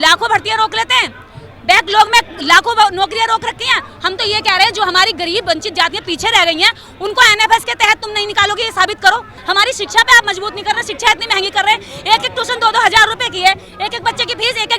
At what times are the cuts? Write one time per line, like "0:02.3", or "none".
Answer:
0:09.3